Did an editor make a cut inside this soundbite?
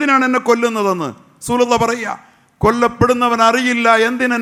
no; 0 cuts

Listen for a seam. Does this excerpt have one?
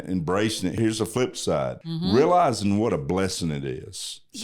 yes; 2 cuts; at 0.7 s, 1.8 s

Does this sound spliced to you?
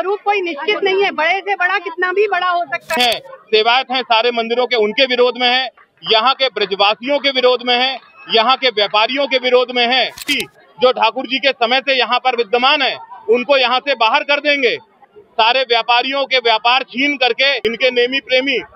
yes; 4 cuts; at 3.0 s, 10.3 s, 15.1 s, 17.6 s

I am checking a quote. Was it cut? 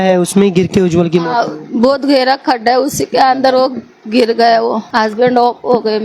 yes; 1 cut; at 4.8 s

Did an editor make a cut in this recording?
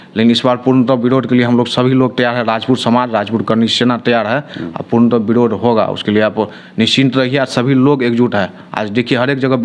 no; 0 cuts

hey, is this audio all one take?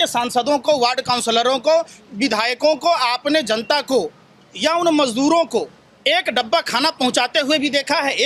yes; 0 cuts

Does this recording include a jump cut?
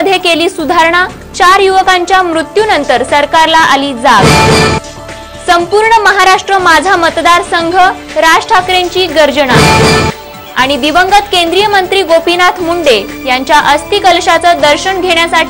no; 0 cuts

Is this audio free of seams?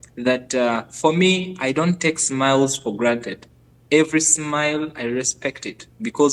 yes; 0 cuts

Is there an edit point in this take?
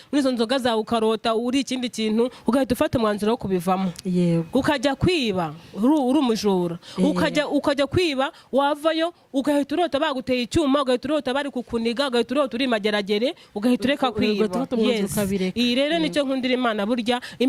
no; 0 cuts

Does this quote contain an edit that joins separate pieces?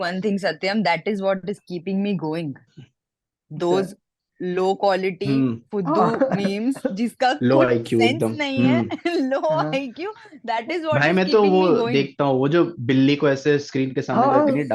no; 0 cuts

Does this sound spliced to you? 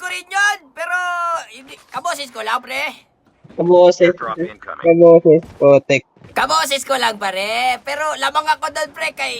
yes; 1 cut; at 3.3 s

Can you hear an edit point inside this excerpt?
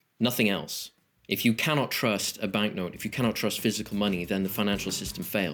no; 0 cuts

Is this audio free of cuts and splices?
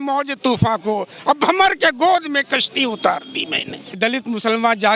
no; 1 cut; at 3.9 s

